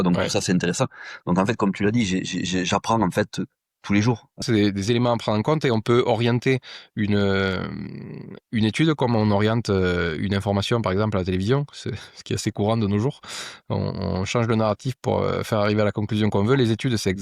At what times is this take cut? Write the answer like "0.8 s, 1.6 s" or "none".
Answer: 4.4 s